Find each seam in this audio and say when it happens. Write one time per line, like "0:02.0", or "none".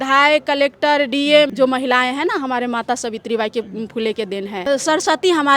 0:01.5
0:04.7